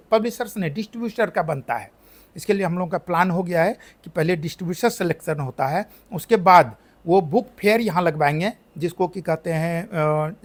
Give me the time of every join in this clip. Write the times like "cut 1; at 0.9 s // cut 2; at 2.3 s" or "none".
none

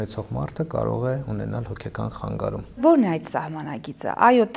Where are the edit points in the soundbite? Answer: cut 1; at 2.8 s

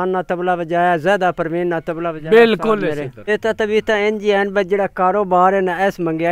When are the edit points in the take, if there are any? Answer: cut 1; at 3.1 s

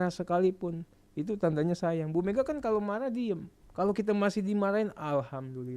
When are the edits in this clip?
cut 1; at 3.6 s

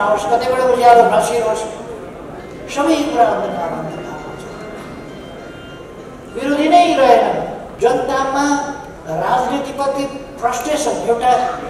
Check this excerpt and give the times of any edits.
cut 1; at 7.6 s

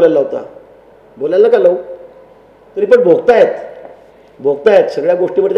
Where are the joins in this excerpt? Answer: cut 1; at 2.6 s

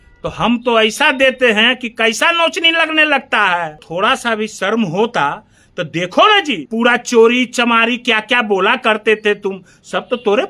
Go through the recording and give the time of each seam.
cut 1; at 3.8 s // cut 2; at 6.6 s

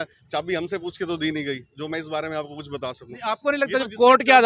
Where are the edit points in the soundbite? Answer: none

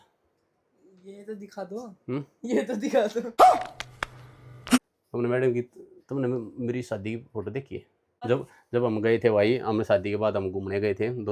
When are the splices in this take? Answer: cut 1; at 4.8 s // cut 2; at 8.1 s

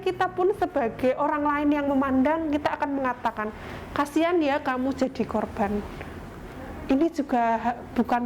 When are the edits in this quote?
none

